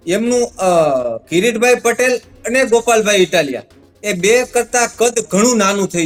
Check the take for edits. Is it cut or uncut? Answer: uncut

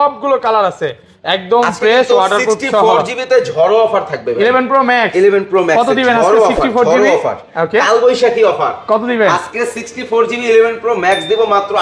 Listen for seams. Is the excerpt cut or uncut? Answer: uncut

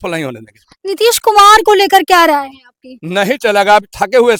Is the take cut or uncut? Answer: uncut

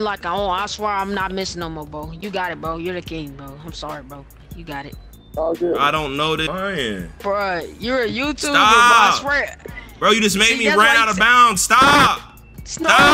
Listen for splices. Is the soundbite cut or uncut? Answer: cut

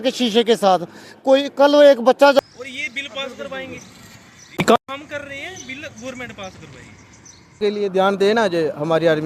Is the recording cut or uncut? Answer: cut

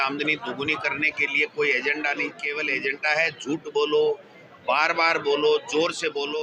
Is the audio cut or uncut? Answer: cut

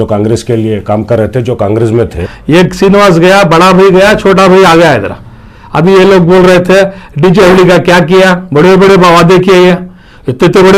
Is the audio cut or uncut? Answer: cut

